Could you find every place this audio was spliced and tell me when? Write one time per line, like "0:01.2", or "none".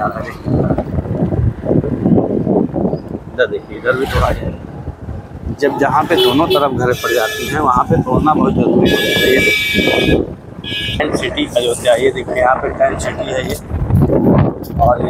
0:11.0